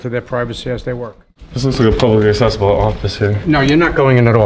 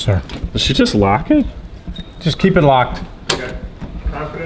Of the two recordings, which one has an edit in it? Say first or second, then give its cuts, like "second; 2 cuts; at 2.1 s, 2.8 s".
first; 1 cut; at 1.4 s